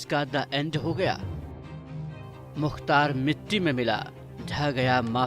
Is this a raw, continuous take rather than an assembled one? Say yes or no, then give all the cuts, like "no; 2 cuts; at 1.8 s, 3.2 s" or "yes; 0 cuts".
no; 2 cuts; at 1.2 s, 2.5 s